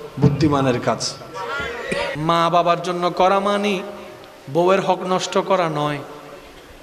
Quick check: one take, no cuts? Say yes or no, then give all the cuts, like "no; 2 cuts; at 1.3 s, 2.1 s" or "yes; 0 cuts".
no; 1 cut; at 2.1 s